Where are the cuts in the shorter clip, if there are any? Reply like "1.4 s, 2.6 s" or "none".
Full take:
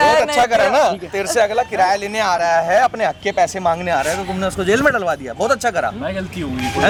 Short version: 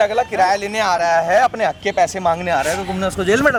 none